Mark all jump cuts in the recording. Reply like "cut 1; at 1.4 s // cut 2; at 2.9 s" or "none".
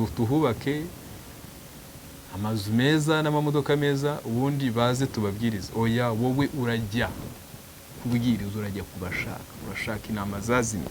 none